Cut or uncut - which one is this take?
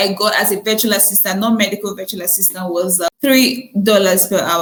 uncut